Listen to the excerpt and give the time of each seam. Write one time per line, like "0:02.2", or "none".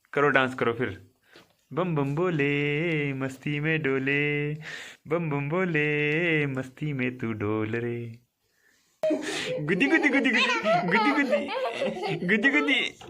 0:09.2